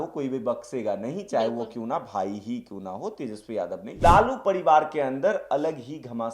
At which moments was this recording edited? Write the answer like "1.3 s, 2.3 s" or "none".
3.8 s